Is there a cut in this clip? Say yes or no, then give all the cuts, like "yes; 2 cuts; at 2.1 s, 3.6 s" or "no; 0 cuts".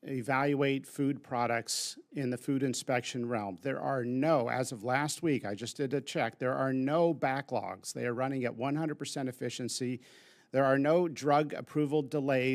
no; 0 cuts